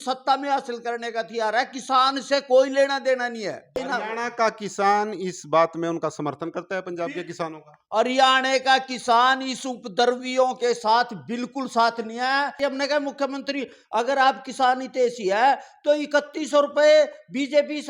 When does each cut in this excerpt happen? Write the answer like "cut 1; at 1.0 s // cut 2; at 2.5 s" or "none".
cut 1; at 3.8 s // cut 2; at 12.6 s